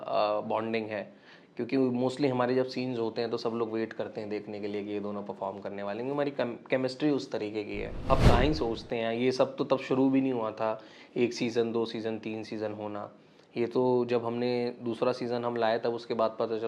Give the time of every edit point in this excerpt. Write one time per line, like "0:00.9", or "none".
0:08.1